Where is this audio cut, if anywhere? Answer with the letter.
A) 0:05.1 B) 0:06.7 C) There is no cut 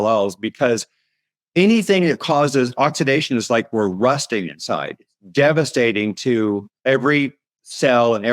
B